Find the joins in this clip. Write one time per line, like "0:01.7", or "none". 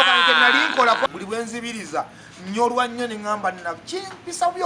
0:01.1